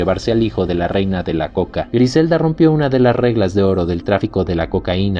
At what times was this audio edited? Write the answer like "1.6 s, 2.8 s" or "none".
1.9 s